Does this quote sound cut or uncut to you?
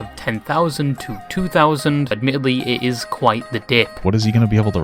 cut